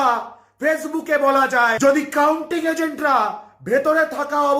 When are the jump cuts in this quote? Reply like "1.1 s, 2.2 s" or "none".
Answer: 1.7 s